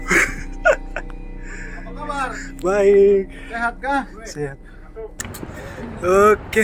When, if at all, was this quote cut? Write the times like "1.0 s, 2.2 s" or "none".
5.2 s